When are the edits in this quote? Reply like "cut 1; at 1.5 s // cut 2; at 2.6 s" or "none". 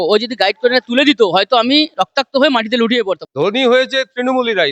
cut 1; at 3.2 s